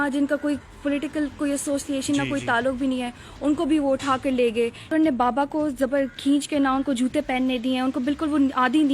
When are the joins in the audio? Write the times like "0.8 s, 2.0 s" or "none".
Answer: 4.9 s